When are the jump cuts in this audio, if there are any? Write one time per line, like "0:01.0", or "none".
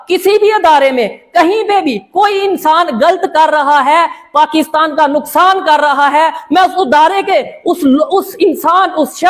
none